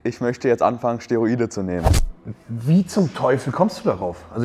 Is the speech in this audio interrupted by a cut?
yes; 1 cut; at 2.0 s

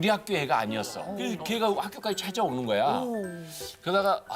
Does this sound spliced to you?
yes; 1 cut; at 1.1 s

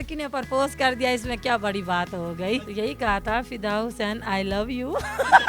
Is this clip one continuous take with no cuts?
no; 1 cut; at 2.6 s

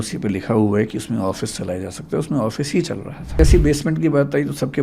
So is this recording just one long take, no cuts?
no; 1 cut; at 3.4 s

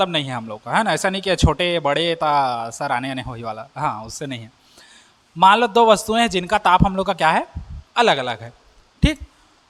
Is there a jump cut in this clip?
no; 0 cuts

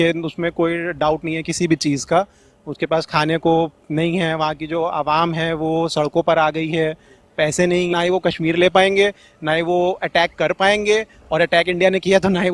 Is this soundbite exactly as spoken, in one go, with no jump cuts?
no; 1 cut; at 7.9 s

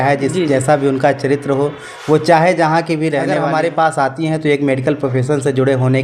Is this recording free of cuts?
no; 1 cut; at 3.4 s

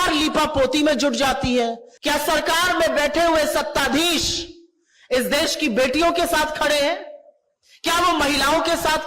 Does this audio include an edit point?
yes; 1 cut; at 1.9 s

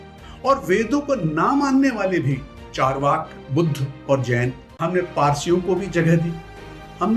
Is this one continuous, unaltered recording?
no; 1 cut; at 4.7 s

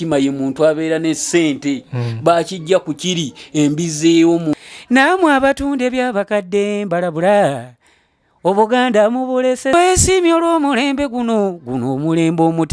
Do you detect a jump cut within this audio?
yes; 2 cuts; at 4.5 s, 9.7 s

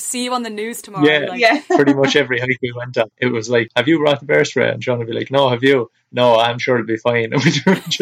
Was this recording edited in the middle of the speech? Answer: yes; 2 cuts; at 0.9 s, 3.5 s

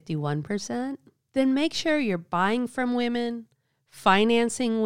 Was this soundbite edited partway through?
yes; 1 cut; at 1.1 s

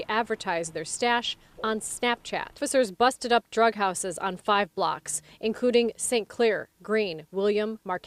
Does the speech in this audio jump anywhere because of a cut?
no; 0 cuts

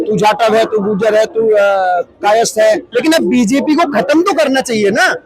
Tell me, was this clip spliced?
yes; 1 cut; at 2.9 s

